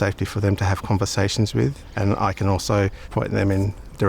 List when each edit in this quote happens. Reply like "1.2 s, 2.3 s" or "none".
1.8 s, 3.0 s